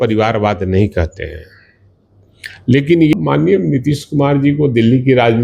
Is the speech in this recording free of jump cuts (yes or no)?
no